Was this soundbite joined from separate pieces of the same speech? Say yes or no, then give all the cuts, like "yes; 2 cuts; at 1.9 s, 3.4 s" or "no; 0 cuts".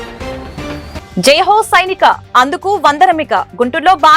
yes; 1 cut; at 1.0 s